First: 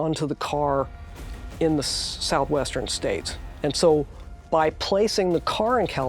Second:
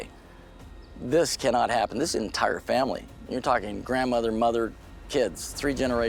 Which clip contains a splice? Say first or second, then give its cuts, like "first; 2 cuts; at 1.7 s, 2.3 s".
first; 1 cut; at 3.5 s